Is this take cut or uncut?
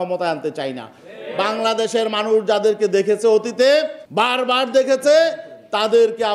cut